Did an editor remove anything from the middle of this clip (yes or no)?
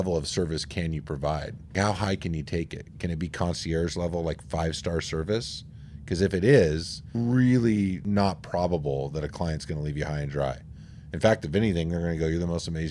yes